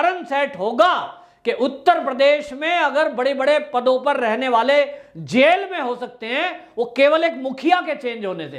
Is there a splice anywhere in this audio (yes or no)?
no